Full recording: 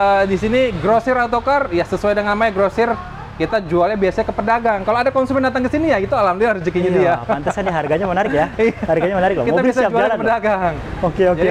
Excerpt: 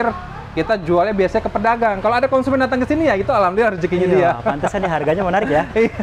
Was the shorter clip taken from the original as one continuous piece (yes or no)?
yes